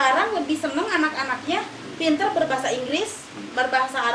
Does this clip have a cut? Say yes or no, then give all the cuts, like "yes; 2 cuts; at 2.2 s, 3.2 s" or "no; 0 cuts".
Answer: no; 0 cuts